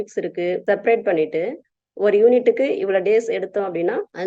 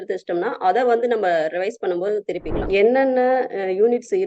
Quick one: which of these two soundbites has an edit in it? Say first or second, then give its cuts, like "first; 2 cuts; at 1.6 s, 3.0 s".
second; 1 cut; at 2.6 s